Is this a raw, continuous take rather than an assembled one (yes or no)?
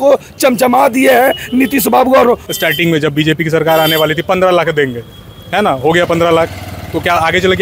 no